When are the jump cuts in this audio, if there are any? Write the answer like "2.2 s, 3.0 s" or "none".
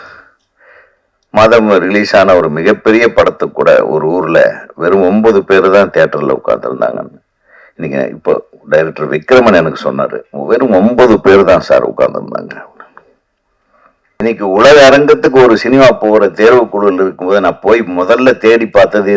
14.2 s